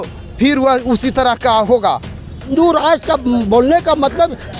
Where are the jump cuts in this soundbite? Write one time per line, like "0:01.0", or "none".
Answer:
0:02.5